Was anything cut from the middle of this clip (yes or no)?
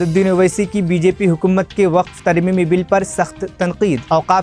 no